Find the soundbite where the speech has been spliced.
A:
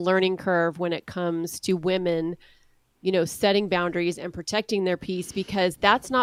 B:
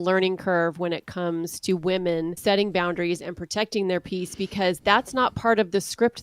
B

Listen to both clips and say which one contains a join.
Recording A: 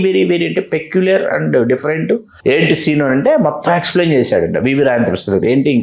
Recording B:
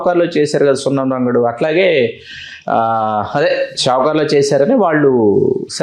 A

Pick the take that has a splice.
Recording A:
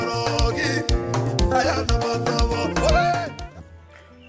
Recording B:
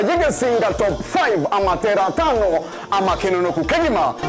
A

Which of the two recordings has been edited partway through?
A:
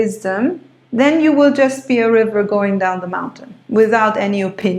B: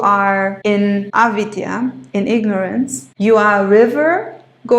B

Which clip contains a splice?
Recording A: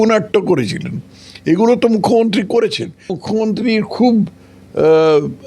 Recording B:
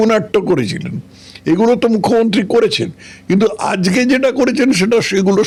A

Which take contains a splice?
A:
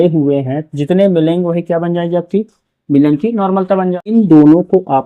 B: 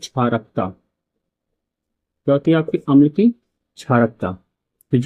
A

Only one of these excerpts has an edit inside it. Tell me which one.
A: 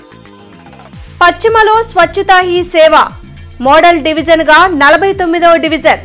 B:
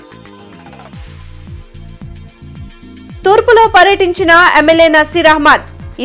A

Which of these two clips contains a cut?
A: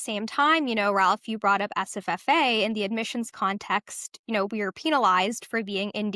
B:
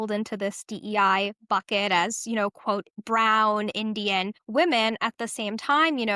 B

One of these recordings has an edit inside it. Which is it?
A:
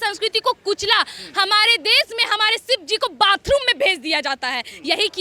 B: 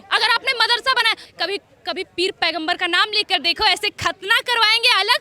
B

